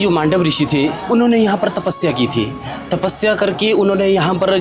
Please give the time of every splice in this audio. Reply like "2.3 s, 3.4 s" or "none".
1.0 s